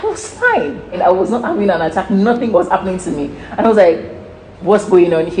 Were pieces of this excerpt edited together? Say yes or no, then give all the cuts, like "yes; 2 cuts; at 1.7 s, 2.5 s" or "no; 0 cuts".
yes; 2 cuts; at 1.0 s, 2.5 s